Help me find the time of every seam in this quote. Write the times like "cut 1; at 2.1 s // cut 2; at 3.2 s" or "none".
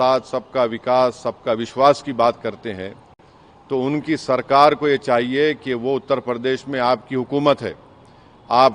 none